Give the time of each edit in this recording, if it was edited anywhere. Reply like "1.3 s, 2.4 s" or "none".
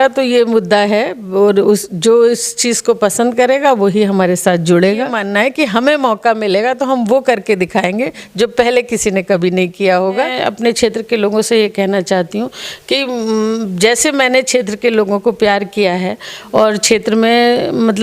5.2 s, 10.3 s